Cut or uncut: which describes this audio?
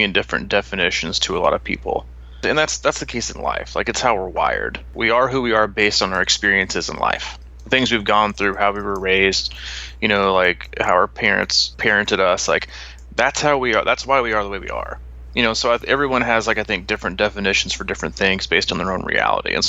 cut